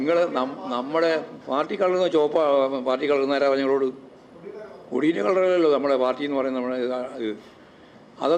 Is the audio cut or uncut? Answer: uncut